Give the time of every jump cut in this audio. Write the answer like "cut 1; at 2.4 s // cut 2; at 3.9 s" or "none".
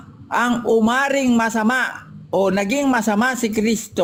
none